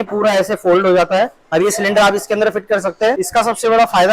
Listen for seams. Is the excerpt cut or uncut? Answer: cut